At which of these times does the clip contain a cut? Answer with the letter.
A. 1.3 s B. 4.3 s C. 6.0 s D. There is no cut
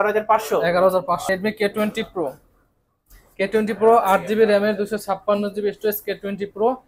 A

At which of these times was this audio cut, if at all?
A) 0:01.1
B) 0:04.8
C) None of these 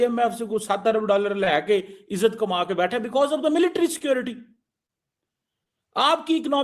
C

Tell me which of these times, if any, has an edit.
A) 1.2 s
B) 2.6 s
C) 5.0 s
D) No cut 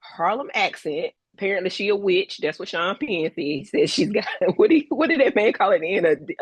A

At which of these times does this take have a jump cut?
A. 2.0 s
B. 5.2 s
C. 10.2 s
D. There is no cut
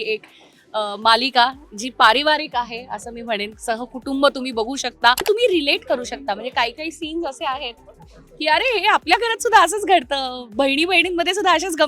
B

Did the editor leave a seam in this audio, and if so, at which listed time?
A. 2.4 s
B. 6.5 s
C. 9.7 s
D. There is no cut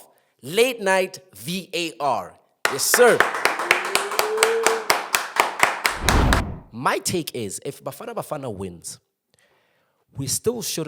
B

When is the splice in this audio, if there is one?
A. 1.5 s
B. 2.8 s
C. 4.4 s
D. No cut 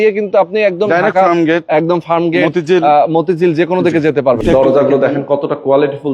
C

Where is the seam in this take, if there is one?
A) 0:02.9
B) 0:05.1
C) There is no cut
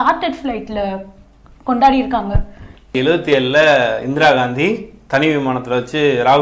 A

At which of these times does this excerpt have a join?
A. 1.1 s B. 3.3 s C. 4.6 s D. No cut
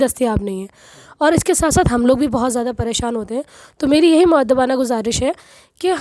D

